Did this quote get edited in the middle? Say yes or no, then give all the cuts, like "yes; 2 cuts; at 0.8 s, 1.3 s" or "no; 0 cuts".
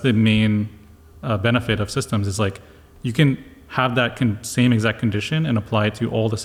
no; 0 cuts